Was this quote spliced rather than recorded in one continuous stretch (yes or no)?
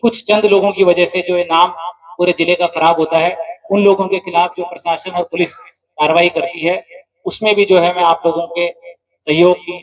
no